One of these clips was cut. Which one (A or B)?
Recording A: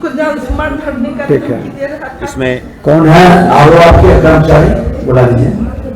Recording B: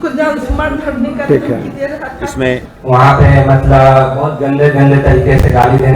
B